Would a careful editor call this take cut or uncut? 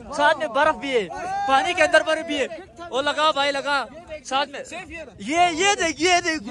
uncut